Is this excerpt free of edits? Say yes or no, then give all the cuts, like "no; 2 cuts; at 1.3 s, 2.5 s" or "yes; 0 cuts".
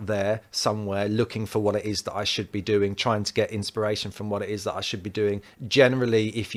yes; 0 cuts